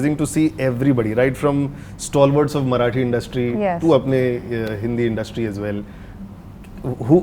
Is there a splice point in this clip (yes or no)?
no